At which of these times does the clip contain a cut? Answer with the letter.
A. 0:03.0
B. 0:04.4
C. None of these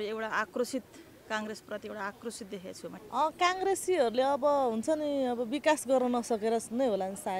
A